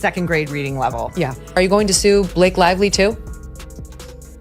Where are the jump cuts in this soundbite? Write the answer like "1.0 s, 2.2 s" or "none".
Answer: 1.4 s